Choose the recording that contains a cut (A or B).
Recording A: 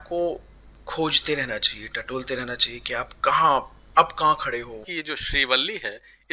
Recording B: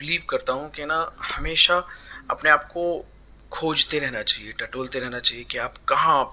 A